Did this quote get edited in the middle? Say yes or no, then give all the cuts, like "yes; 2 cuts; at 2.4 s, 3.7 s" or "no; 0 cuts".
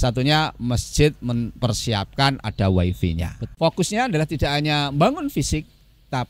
yes; 1 cut; at 3.4 s